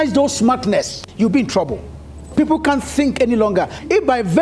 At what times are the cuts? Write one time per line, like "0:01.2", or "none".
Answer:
0:02.2